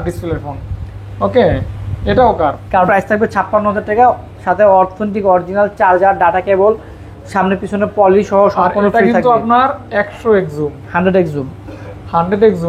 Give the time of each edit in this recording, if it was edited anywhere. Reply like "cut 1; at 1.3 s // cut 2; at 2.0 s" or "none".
cut 1; at 2.9 s